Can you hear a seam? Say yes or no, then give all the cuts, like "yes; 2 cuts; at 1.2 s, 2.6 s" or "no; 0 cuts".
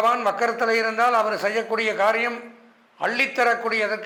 no; 0 cuts